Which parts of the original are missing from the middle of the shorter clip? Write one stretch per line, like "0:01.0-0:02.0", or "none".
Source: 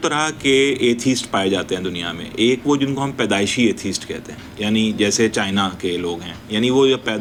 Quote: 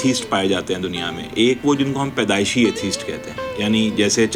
none